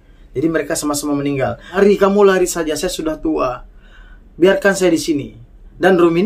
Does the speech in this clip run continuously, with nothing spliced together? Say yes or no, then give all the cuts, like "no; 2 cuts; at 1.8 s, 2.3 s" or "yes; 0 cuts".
no; 1 cut; at 1.8 s